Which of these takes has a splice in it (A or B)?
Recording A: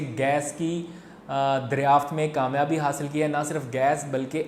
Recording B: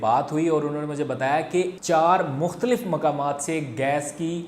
B